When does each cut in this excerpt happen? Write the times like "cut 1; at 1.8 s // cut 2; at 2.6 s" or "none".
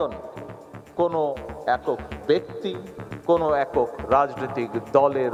none